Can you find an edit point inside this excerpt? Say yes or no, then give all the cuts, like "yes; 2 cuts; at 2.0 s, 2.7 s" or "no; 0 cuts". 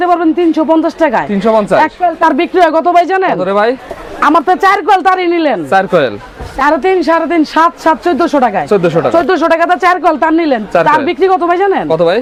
no; 0 cuts